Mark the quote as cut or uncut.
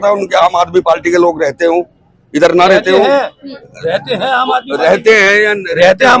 uncut